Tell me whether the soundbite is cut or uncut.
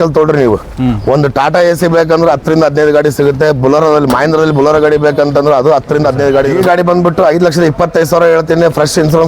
cut